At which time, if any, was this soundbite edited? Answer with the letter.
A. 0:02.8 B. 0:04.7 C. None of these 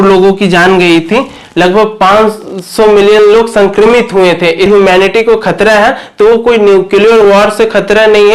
B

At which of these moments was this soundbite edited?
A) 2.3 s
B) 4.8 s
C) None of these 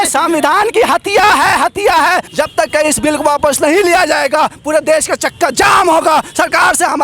A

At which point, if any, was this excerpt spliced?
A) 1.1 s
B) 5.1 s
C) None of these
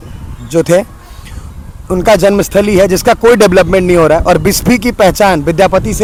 C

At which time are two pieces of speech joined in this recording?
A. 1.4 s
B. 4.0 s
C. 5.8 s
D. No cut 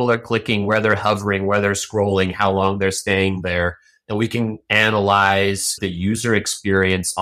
C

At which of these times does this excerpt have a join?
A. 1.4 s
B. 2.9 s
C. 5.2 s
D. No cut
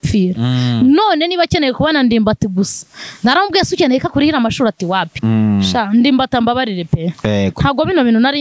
C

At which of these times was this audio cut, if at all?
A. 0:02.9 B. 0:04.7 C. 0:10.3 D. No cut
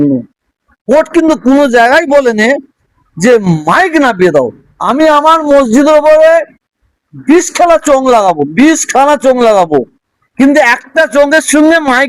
B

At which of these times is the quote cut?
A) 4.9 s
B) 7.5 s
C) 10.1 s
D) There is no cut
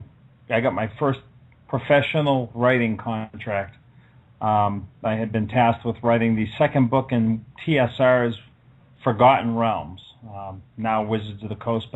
D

